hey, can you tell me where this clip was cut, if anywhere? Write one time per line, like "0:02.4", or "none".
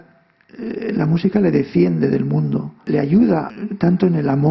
0:02.9
0:03.5